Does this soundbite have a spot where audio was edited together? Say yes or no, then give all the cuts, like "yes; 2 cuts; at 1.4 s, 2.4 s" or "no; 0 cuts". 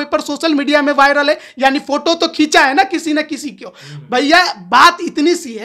no; 0 cuts